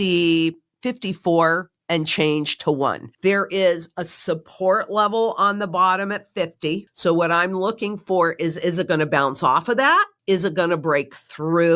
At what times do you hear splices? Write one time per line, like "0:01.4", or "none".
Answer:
0:01.7
0:03.1
0:06.9
0:10.1